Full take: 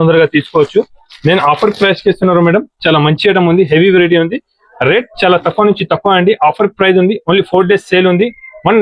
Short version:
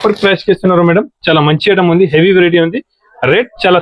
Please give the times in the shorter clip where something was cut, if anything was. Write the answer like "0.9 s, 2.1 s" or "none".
none